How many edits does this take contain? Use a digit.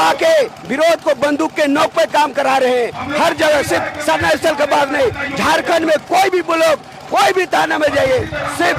0